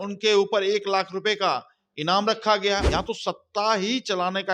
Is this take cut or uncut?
cut